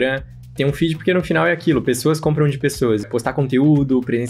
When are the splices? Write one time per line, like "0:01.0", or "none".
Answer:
0:03.1